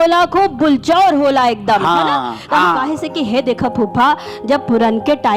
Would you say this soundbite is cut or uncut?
cut